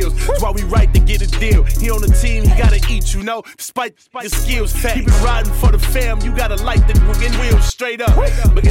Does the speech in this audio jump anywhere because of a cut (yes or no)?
no